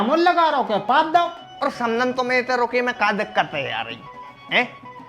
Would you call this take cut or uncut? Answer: cut